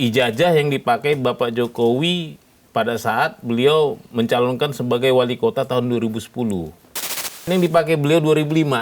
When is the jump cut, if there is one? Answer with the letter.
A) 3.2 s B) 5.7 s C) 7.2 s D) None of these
C